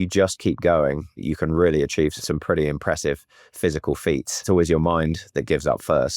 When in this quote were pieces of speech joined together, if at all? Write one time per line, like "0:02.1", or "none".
0:01.2
0:02.2
0:04.4